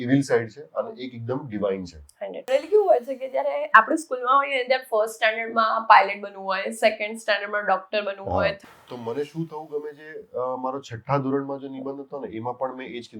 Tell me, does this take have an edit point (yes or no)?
yes